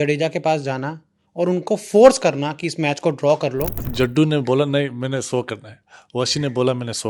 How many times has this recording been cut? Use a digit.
1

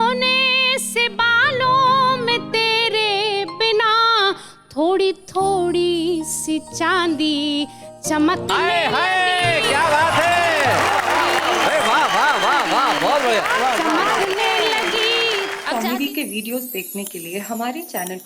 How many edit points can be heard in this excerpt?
1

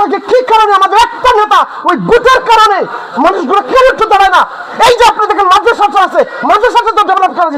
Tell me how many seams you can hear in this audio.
0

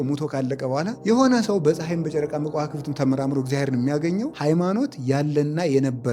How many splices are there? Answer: 2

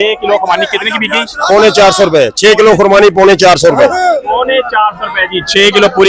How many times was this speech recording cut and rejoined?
0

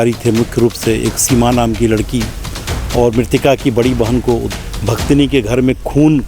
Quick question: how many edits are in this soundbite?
1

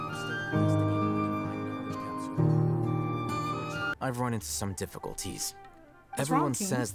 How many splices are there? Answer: 0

